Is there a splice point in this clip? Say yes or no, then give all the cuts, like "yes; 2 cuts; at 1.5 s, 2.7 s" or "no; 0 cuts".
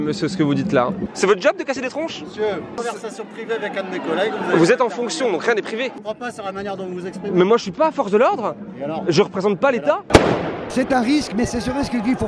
yes; 2 cuts; at 1.1 s, 10.1 s